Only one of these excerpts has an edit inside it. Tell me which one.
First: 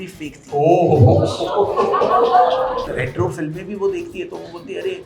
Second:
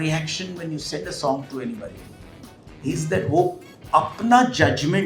first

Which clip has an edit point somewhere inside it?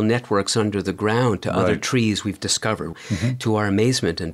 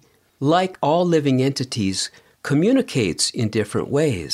first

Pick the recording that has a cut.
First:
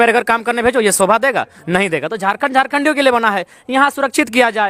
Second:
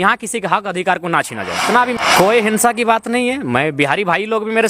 second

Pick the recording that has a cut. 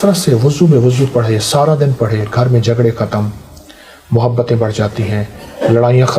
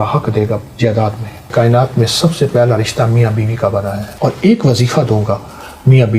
second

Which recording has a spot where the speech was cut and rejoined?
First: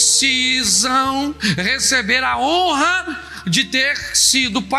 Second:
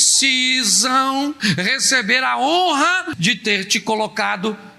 second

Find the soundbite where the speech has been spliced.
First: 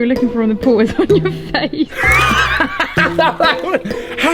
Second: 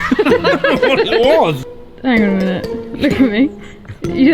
second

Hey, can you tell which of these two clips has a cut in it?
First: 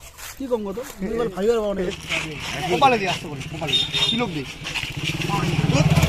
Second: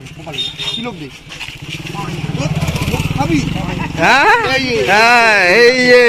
first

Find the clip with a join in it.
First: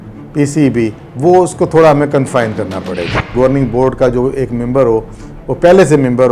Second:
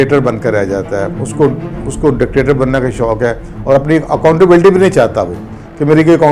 first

